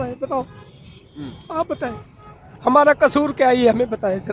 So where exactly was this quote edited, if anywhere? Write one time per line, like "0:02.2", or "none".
0:02.4